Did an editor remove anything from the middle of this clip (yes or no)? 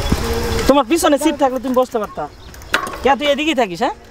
no